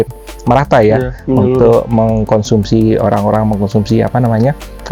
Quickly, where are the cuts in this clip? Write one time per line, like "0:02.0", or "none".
none